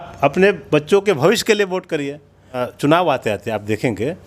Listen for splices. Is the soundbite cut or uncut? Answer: cut